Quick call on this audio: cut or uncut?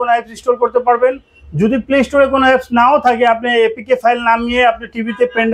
uncut